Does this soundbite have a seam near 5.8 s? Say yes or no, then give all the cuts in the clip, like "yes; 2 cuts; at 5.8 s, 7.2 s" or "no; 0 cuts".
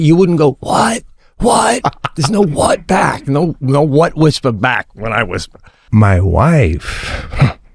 yes; 1 cut; at 5.8 s